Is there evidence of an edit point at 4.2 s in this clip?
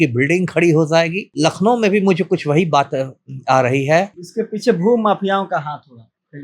yes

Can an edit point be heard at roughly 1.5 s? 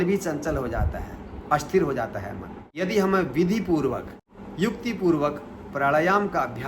no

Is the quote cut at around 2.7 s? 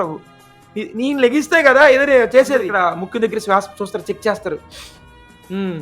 yes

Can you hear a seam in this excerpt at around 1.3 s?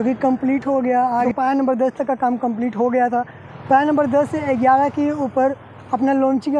yes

